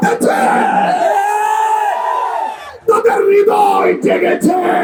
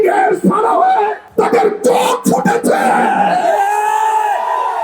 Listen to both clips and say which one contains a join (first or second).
second